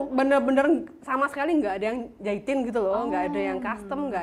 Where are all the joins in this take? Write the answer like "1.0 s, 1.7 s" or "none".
none